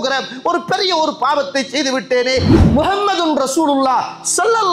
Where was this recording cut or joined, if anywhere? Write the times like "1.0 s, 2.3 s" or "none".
2.5 s